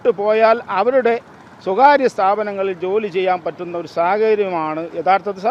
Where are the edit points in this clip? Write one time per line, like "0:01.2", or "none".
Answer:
none